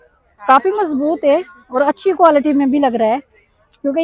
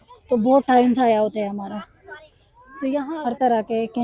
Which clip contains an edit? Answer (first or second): second